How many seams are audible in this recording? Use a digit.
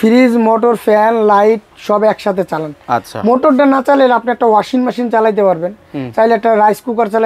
0